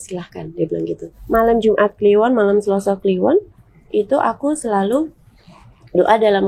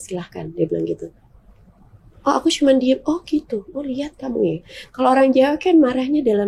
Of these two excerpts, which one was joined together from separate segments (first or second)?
first